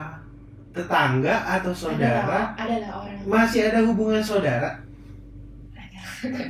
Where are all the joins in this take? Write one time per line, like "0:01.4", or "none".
none